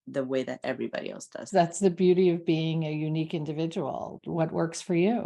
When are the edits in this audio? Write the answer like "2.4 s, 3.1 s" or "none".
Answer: 1.4 s, 4.2 s

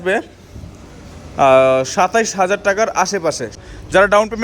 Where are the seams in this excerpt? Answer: 3.5 s

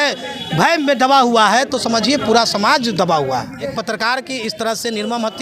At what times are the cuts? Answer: 3.7 s

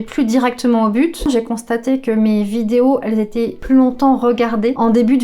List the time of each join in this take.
1.2 s

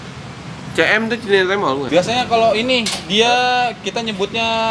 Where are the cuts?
1.8 s

